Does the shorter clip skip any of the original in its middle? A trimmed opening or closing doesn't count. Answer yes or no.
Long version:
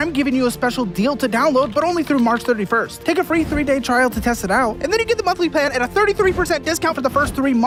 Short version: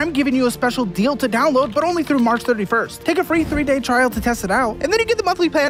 no